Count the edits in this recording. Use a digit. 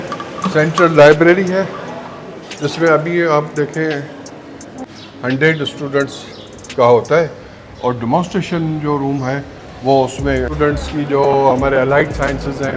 2